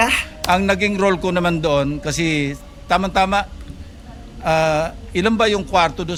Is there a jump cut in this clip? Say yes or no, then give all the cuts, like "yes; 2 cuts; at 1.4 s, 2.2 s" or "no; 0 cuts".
no; 0 cuts